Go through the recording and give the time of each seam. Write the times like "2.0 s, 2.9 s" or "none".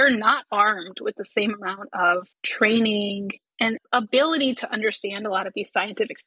2.4 s